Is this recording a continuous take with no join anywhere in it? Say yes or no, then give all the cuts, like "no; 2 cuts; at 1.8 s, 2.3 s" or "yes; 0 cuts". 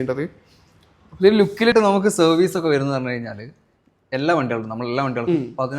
no; 1 cut; at 1.7 s